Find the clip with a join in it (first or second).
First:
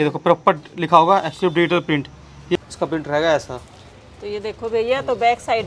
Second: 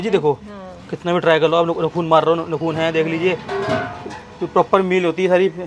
first